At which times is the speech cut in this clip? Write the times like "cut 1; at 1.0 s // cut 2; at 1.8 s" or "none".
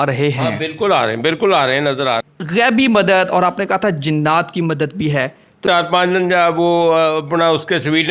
cut 1; at 2.2 s // cut 2; at 5.6 s